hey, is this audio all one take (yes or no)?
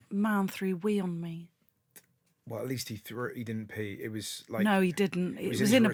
yes